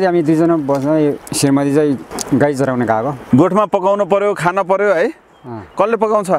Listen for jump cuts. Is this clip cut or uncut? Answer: cut